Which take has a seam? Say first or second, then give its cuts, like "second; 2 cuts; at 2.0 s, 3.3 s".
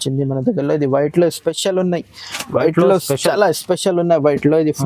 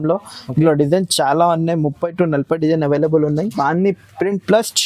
second; 1 cut; at 3.5 s